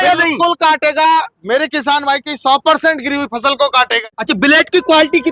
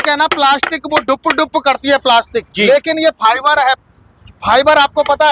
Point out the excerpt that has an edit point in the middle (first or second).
first